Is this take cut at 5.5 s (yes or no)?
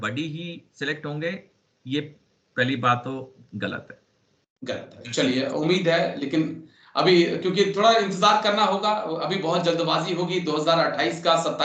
no